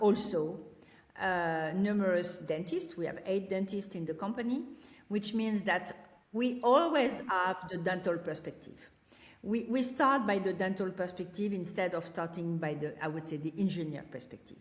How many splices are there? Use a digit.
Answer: 0